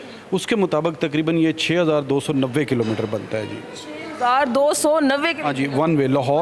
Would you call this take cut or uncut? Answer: uncut